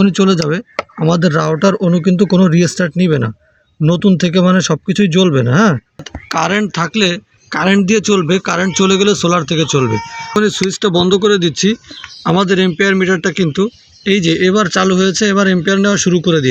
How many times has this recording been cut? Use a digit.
2